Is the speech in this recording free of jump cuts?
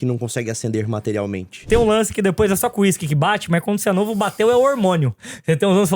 no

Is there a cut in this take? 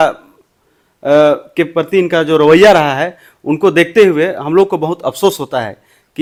no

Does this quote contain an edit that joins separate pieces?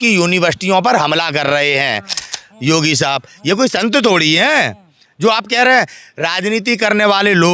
yes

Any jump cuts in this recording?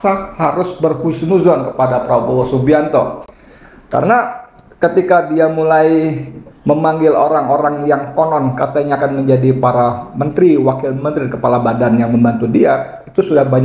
no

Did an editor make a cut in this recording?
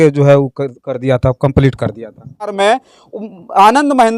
yes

